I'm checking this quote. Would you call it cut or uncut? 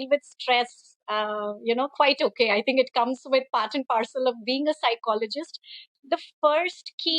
cut